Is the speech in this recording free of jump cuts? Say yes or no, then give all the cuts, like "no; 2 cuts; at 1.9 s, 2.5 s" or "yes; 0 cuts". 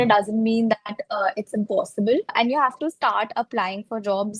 no; 1 cut; at 2.3 s